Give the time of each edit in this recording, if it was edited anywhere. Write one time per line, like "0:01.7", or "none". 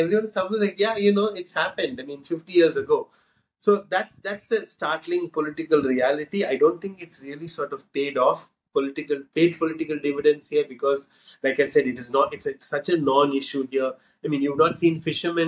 none

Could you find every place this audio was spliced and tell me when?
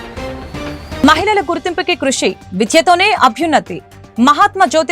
0:01.0

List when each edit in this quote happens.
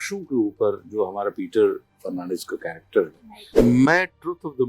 0:03.5

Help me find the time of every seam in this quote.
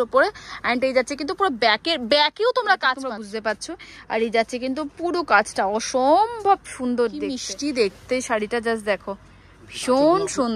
0:03.0
0:07.5

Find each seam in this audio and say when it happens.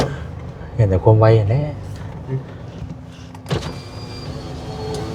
0:03.0

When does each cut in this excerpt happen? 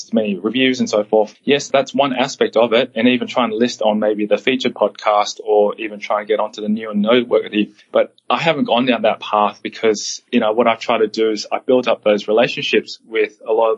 none

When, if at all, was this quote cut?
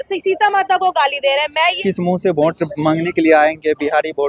0:01.8

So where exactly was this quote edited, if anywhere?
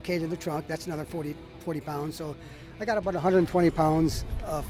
none

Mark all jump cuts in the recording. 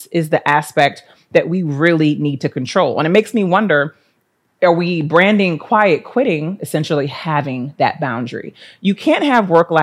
none

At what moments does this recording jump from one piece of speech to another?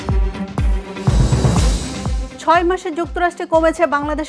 0:02.2

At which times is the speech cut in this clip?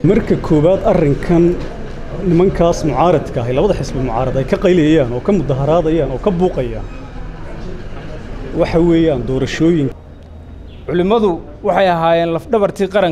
0:09.9

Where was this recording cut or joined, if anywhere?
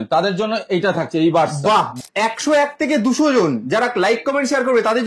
0:01.9

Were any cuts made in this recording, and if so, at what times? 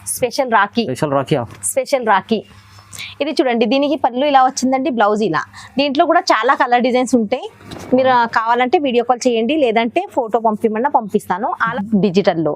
0:11.7

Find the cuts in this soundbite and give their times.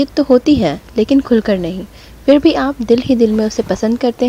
none

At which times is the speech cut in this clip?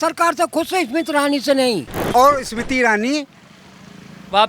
0:01.9

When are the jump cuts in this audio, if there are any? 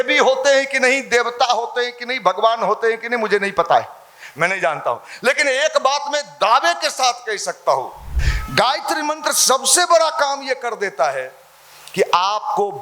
0:08.2

